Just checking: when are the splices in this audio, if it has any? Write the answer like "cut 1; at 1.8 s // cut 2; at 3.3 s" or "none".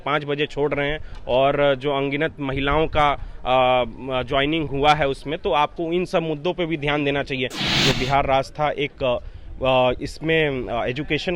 cut 1; at 7.6 s